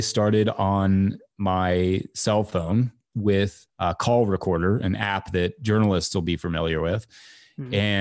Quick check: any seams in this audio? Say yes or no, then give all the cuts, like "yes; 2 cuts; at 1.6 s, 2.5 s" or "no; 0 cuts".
no; 0 cuts